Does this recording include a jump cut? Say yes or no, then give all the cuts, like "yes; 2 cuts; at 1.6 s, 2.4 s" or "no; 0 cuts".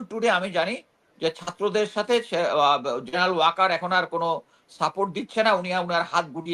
no; 0 cuts